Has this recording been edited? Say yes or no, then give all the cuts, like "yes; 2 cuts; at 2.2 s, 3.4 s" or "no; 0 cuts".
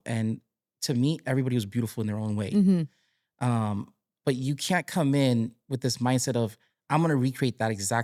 no; 0 cuts